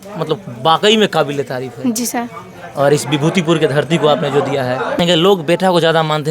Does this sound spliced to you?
yes; 1 cut; at 5.0 s

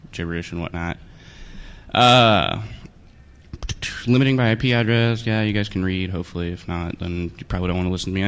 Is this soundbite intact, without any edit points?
yes; 0 cuts

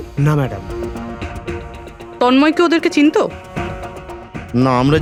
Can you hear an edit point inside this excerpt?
no; 0 cuts

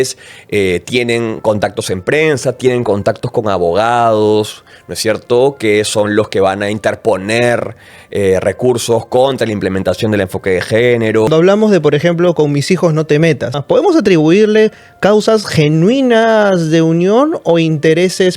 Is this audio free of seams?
no; 2 cuts; at 11.3 s, 13.6 s

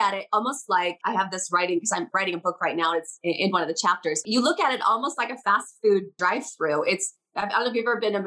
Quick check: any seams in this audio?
yes; 3 cuts; at 1.0 s, 4.2 s, 6.2 s

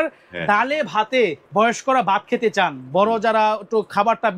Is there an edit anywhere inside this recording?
yes; 1 cut; at 1.4 s

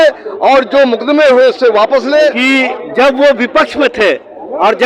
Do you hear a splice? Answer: yes; 1 cut; at 2.8 s

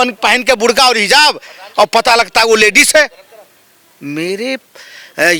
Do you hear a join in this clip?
no; 0 cuts

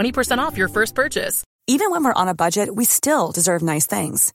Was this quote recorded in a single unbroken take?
no; 1 cut; at 1.4 s

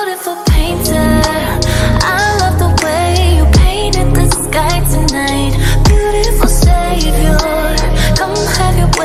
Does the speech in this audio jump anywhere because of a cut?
no; 0 cuts

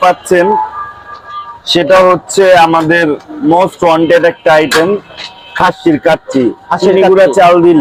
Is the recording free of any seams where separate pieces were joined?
yes; 0 cuts

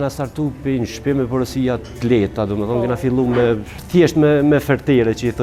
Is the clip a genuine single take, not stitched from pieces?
no; 1 cut; at 3.7 s

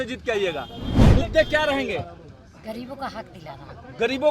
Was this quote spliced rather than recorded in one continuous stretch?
yes; 1 cut; at 0.9 s

